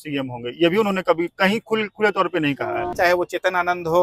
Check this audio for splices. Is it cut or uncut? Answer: cut